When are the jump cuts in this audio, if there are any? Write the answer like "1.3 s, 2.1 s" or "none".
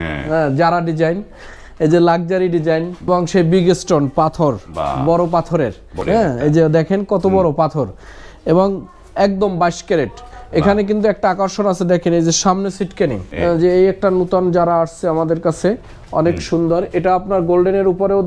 3.1 s, 5.9 s, 13.3 s